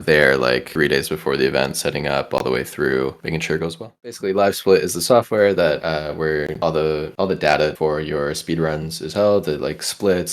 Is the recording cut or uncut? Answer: cut